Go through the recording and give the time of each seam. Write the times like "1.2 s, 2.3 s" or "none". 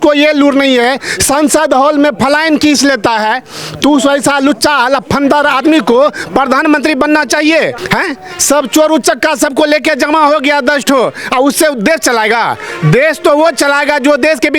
7.8 s